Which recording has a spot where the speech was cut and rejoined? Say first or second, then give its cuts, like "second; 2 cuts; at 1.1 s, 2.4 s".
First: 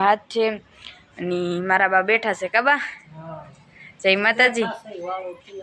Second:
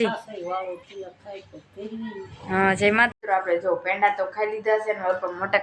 second; 1 cut; at 3.1 s